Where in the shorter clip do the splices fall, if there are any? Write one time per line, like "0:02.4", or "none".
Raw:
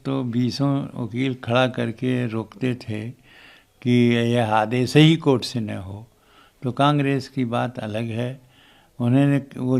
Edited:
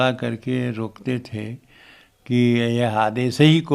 none